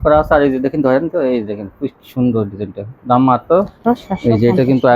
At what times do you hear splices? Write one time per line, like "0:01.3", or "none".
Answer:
0:03.8

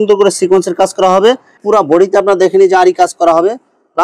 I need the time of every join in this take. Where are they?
0:01.5

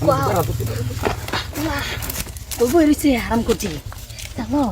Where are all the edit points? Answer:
none

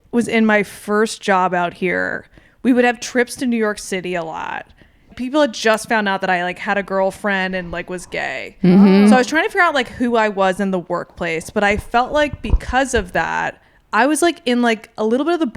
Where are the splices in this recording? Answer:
0:05.1

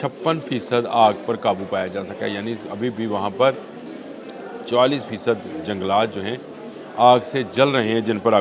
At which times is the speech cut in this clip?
none

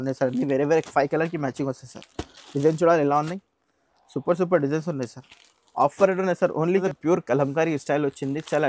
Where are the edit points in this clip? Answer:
0:06.8

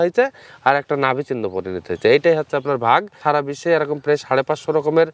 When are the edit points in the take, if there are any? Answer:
0:03.1

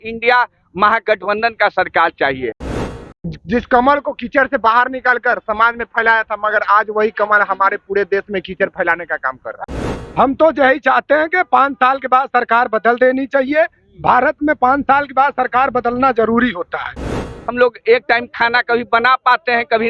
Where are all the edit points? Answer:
0:02.6
0:09.6
0:17.3

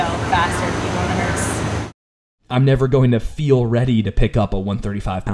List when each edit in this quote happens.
0:02.0

